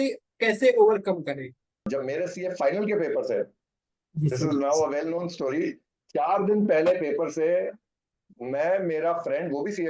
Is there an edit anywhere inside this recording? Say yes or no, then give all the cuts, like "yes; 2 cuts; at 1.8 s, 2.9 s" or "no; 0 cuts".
yes; 1 cut; at 1.9 s